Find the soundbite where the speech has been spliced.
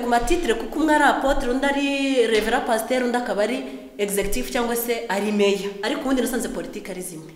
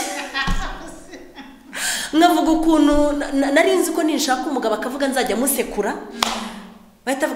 first; 1 cut; at 5.7 s

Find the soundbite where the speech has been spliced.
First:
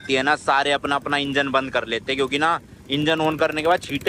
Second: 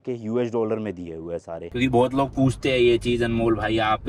second; 1 cut; at 1.6 s

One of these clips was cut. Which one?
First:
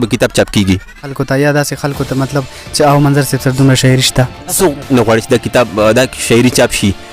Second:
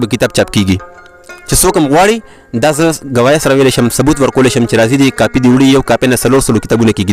first; 2 cuts; at 1.1 s, 4.6 s

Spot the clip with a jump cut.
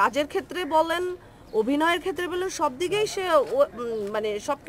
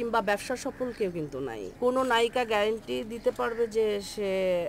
second; 1 cut; at 1.6 s

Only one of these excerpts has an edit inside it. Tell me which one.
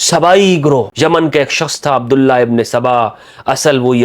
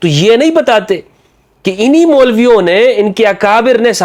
first; 1 cut; at 0.9 s

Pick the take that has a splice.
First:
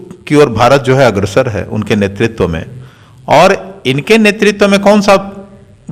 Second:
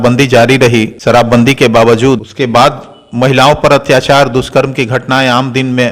second; 2 cuts; at 0.9 s, 2.3 s

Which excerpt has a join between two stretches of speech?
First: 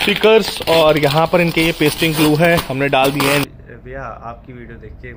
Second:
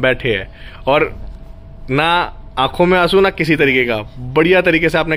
first; 1 cut; at 3.5 s

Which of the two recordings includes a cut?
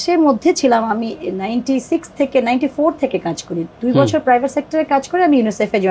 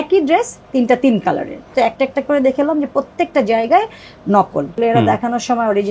second; 2 cuts; at 1.7 s, 4.7 s

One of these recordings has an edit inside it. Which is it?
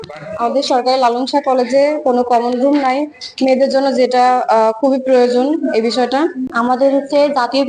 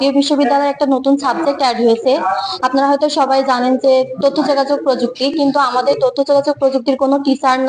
first; 1 cut; at 6.5 s

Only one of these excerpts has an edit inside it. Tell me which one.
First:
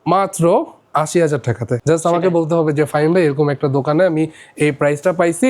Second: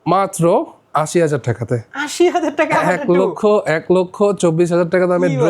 first; 1 cut; at 1.7 s

